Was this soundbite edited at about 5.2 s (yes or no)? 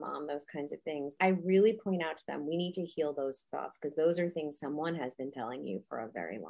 no